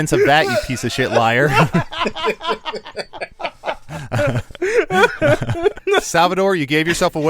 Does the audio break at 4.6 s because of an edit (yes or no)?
no